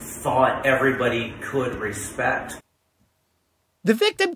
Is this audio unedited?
no; 1 cut; at 2.5 s

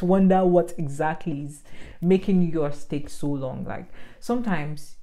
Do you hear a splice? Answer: no; 0 cuts

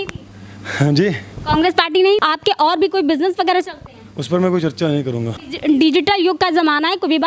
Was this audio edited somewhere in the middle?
yes; 2 cuts; at 2.2 s, 5.3 s

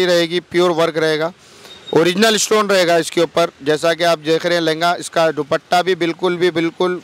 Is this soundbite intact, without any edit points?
yes; 0 cuts

